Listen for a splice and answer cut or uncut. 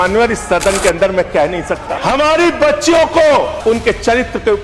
cut